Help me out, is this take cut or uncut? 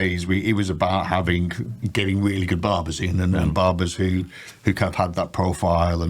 uncut